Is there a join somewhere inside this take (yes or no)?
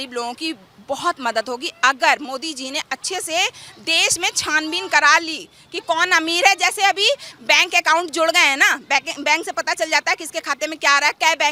no